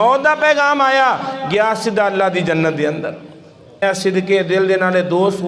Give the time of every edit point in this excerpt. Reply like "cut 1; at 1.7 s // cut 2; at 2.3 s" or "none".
cut 1; at 3.8 s